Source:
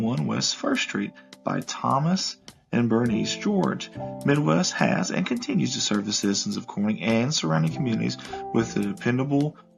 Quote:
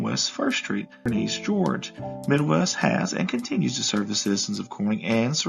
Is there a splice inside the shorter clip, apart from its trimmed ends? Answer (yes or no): yes